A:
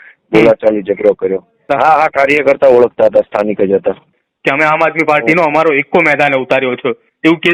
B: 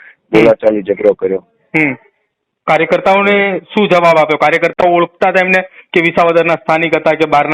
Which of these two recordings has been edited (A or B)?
A